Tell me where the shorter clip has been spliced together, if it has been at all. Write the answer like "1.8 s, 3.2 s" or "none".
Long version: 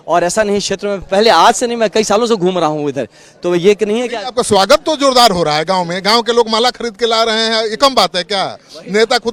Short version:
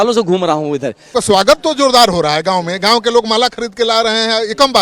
1.0 s